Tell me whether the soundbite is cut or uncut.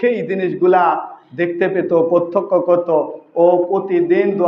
uncut